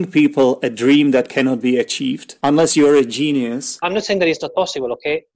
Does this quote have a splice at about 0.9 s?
no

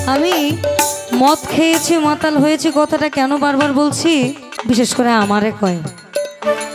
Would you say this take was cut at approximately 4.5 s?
yes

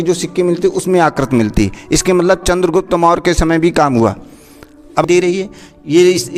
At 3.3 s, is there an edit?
no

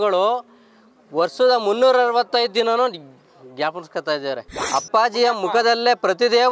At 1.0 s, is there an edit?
no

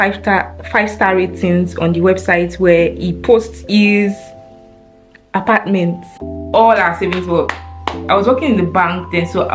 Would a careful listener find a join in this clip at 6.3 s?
yes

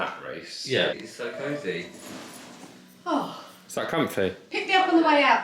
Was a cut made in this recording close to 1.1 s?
yes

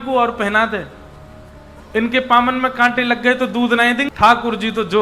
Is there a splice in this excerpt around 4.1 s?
yes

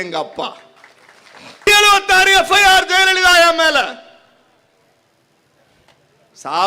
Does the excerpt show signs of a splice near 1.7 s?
yes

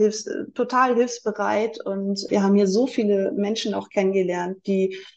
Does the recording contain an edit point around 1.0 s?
no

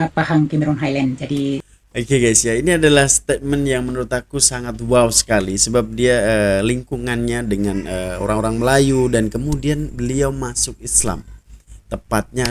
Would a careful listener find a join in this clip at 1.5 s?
yes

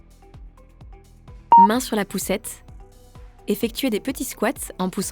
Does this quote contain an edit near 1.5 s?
yes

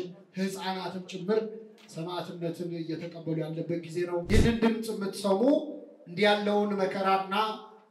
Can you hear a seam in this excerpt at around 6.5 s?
no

